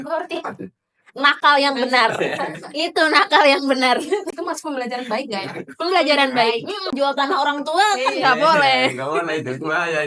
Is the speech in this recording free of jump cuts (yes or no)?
no